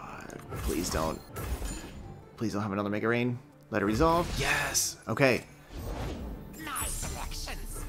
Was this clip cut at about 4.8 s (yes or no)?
no